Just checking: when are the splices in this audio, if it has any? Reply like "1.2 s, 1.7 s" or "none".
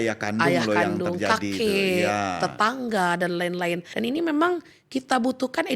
3.9 s